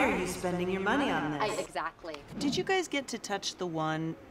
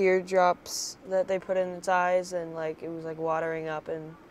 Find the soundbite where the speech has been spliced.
first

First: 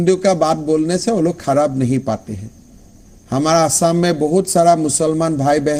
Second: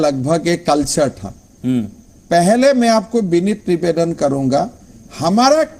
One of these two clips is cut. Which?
second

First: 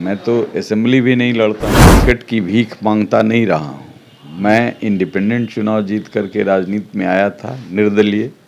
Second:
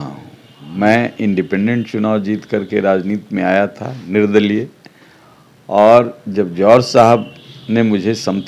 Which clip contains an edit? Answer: first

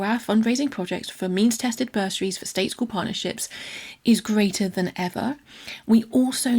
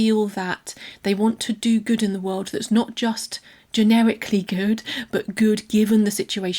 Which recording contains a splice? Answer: first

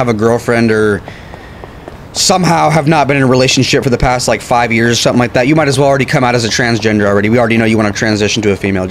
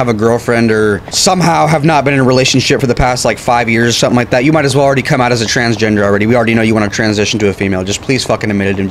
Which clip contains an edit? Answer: second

